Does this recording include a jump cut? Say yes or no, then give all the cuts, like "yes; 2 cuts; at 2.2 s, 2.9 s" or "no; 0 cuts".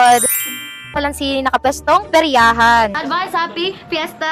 yes; 2 cuts; at 0.9 s, 2.9 s